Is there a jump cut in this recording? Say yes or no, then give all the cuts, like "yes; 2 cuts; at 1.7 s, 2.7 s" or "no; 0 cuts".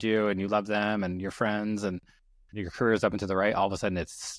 no; 0 cuts